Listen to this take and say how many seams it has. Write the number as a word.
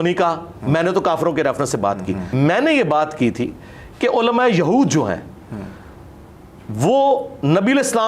one